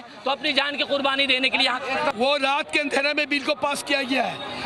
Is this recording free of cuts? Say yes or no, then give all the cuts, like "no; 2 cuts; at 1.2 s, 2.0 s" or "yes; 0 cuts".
no; 1 cut; at 2.1 s